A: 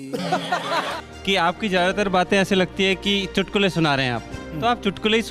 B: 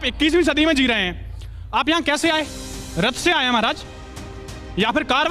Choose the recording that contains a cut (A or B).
A